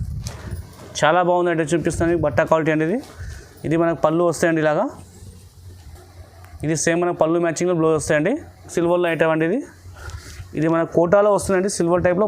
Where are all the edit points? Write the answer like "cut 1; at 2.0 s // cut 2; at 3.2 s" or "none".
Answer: cut 1; at 8.7 s